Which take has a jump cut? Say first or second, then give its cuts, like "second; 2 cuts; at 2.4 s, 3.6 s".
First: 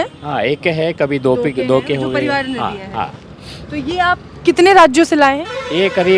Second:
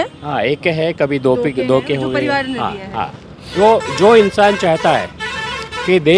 second; 1 cut; at 3.5 s